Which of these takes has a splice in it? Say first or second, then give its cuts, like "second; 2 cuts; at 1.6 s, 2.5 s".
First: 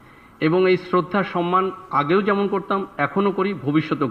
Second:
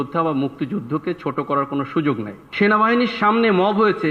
second; 1 cut; at 2.4 s